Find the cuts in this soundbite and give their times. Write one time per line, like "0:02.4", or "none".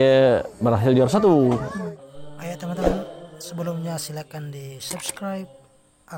0:01.9